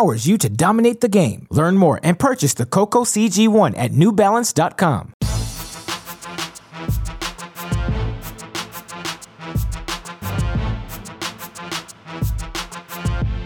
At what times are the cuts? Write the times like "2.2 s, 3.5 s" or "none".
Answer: 5.2 s, 10.0 s